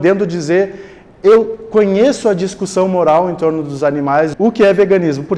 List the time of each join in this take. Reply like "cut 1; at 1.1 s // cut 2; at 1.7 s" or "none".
cut 1; at 4.3 s